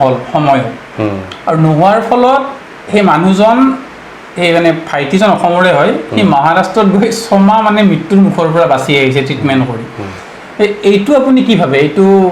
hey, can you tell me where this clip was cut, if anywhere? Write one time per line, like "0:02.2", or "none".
none